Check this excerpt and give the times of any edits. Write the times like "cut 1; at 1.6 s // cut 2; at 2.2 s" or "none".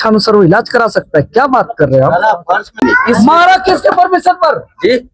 cut 1; at 2.8 s